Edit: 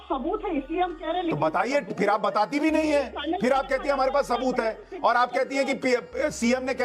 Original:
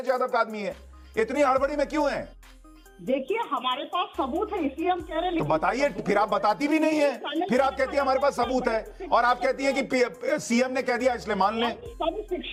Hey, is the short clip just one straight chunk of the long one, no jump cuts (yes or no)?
yes